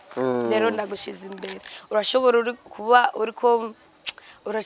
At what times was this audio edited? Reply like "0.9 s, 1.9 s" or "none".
1.7 s